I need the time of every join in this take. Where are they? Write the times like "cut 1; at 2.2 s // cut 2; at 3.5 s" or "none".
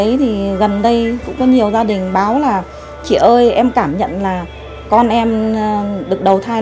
none